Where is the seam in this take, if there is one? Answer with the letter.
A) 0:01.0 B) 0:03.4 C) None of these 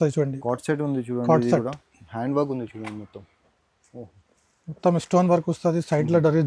C